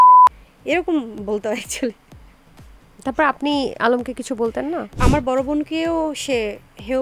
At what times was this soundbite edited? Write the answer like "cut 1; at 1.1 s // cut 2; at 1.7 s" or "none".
cut 1; at 4.9 s